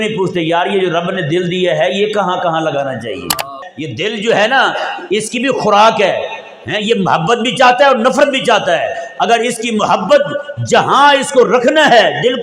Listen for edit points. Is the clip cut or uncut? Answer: cut